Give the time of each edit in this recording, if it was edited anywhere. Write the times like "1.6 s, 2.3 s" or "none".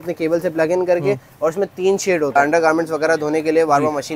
2.4 s